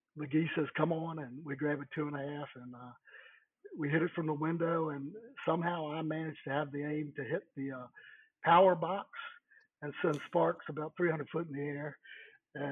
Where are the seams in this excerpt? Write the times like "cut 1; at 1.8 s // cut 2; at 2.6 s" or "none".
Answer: none